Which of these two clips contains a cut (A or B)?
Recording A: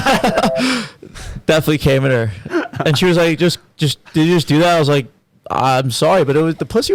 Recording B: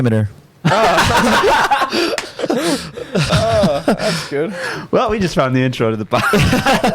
B